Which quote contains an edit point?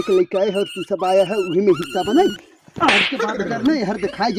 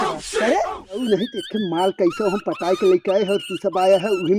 second; 1 cut; at 1.0 s

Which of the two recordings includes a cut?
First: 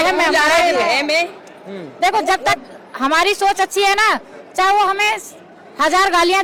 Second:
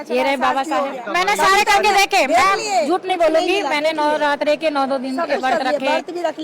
second; 1 cut; at 1.0 s

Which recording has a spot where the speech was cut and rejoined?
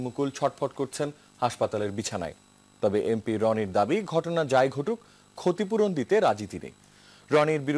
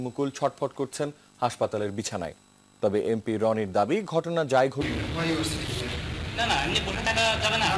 first; 1 cut; at 4.8 s

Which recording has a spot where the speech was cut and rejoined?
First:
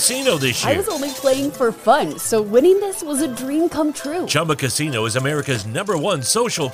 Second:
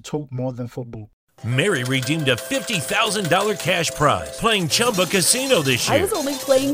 second; 1 cut; at 1.0 s

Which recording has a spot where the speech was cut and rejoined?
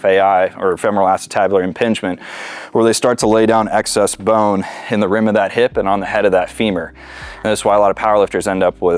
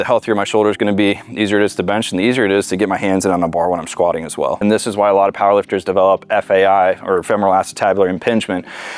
second; 1 cut; at 4.6 s

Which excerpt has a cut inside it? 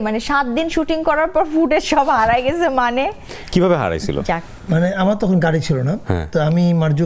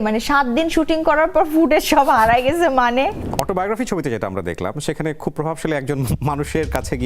second; 1 cut; at 3.3 s

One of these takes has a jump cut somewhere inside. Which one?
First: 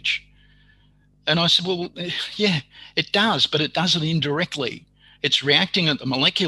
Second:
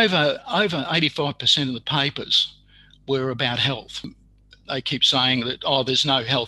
second; 1 cut; at 4.2 s

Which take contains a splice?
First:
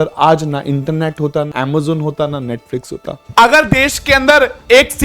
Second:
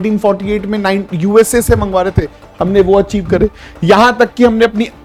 first; 2 cuts; at 1.5 s, 3.2 s

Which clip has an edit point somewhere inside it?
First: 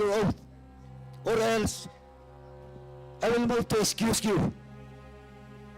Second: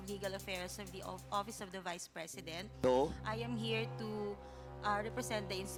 first; 3 cuts; at 1.9 s, 3.2 s, 4.9 s

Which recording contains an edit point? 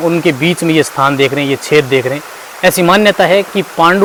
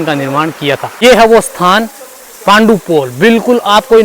second; 1 cut; at 1.0 s

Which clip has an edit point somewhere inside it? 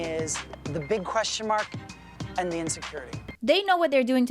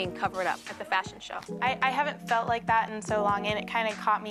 first; 1 cut; at 3.3 s

